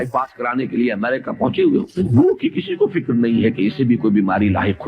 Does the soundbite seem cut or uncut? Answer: cut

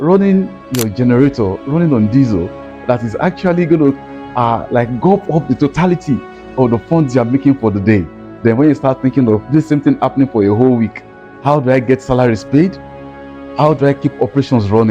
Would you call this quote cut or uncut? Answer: uncut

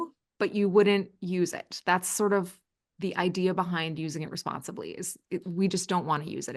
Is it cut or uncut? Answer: uncut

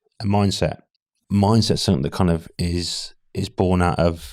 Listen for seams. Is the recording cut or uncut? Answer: cut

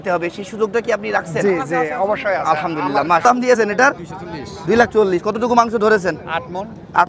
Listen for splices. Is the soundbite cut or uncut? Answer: cut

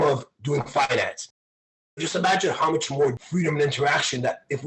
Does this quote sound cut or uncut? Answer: cut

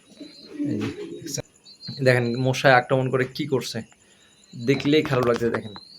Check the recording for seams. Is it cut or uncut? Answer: cut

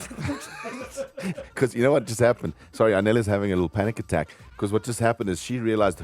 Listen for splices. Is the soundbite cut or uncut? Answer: uncut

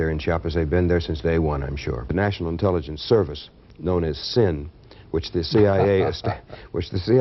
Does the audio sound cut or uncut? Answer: cut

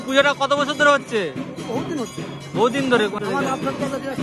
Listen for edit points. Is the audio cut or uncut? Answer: cut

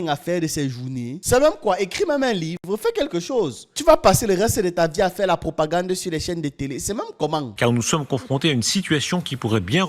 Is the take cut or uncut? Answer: cut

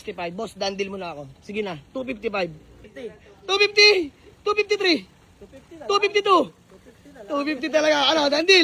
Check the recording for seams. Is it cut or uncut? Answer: cut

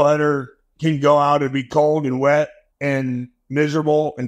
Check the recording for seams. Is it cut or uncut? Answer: cut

